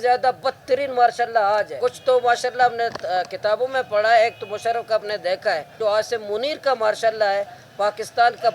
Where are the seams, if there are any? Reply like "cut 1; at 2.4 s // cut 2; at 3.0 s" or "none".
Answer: cut 1; at 1.7 s // cut 2; at 5.8 s